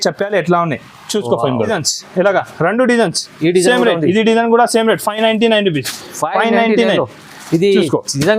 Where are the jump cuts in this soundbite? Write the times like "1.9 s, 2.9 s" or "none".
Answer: 1.7 s